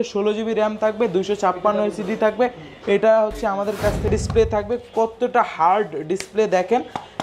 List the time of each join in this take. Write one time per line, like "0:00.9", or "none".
0:04.1